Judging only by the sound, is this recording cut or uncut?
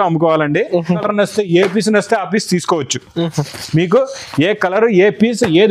cut